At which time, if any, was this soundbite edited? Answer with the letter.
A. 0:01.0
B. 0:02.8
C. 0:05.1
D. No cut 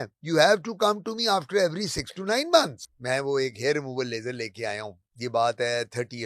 B